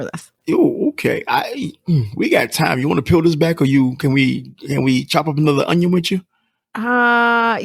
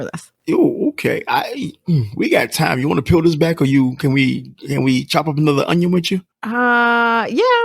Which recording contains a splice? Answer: second; 1 cut; at 6.4 s

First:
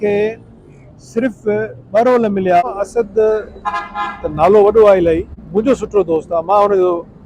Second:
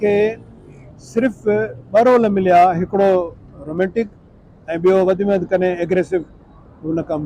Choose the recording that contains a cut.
first; 2 cuts; at 2.6 s, 5.4 s

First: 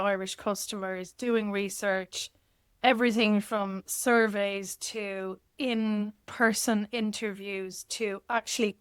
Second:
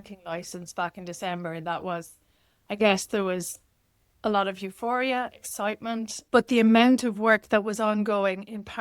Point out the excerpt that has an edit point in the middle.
second; 1 cut; at 6.2 s

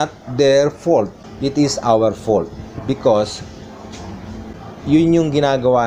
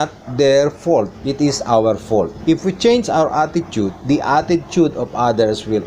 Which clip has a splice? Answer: second; 3 cuts; at 1.2 s, 2.3 s, 4.0 s

